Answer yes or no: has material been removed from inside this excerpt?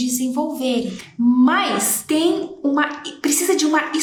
no